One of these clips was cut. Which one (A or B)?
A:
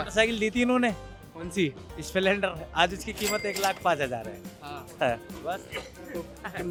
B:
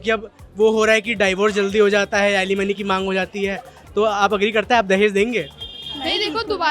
B